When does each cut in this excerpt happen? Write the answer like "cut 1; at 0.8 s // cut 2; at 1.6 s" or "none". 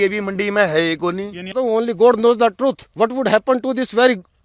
cut 1; at 1.5 s